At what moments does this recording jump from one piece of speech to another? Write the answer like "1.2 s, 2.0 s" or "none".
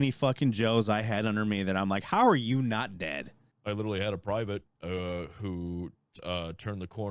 3.5 s